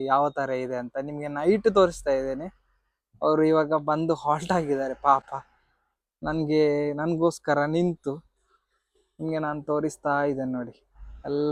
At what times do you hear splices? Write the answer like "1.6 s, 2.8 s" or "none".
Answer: none